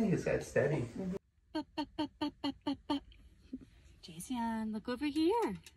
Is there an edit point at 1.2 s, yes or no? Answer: yes